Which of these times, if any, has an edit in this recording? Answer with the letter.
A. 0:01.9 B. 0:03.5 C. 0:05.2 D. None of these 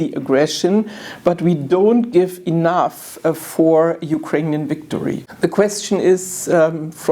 C